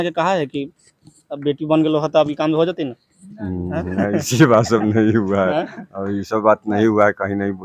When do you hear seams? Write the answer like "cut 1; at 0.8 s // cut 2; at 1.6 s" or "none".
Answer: none